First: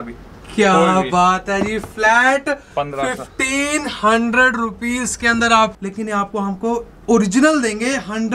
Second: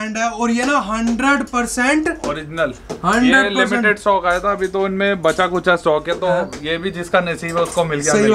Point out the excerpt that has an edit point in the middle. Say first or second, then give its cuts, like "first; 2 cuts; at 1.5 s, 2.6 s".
first; 1 cut; at 5.8 s